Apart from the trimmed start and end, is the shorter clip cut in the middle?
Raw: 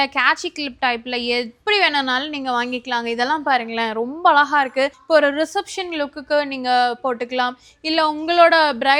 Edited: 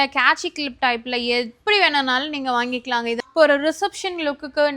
yes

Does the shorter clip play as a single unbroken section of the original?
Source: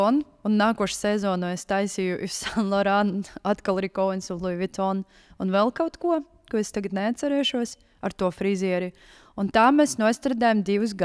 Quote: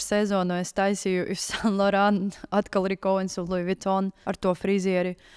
no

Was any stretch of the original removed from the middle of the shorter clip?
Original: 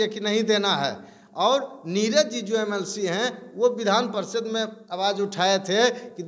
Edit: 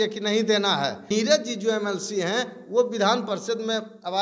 yes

